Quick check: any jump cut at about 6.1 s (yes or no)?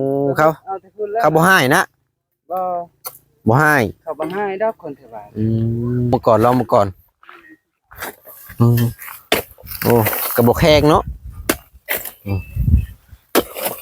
yes